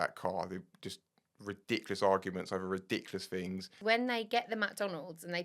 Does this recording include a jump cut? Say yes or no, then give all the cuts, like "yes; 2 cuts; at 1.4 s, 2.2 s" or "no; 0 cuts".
yes; 1 cut; at 3.8 s